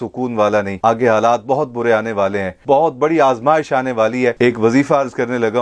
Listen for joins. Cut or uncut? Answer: cut